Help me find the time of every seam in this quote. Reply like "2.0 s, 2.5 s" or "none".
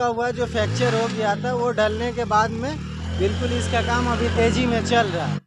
none